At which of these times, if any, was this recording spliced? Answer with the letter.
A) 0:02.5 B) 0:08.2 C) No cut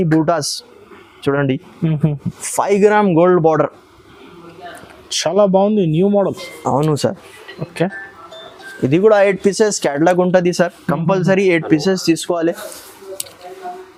C